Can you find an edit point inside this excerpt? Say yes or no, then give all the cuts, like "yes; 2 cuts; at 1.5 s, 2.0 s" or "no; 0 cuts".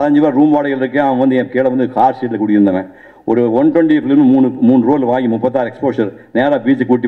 no; 0 cuts